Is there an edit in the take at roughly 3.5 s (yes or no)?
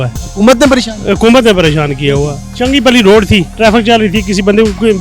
yes